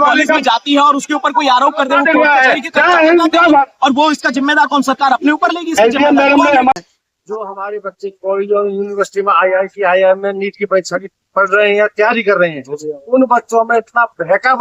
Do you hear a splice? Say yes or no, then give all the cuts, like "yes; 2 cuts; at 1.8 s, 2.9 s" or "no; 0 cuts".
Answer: yes; 1 cut; at 6.7 s